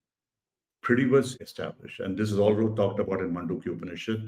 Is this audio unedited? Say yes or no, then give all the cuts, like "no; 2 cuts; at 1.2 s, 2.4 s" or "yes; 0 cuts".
no; 1 cut; at 1.4 s